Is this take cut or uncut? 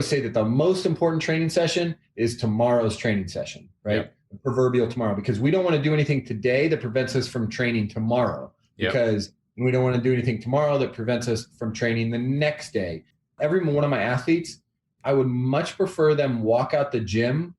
cut